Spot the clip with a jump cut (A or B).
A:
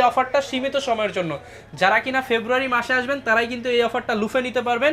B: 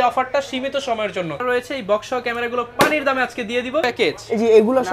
B